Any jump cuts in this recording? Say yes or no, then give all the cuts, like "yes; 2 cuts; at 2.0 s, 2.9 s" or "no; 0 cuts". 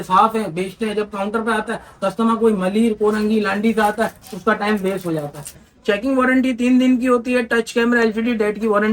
yes; 1 cut; at 5.6 s